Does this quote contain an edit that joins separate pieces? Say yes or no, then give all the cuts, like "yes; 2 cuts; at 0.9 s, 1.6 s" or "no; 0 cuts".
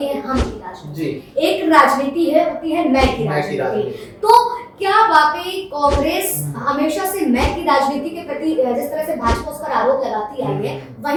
no; 0 cuts